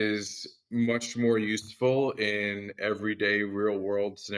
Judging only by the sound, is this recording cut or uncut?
uncut